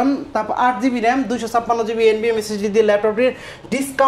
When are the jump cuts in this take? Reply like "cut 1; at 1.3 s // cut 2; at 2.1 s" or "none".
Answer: none